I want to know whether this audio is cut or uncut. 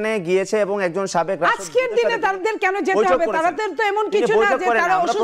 uncut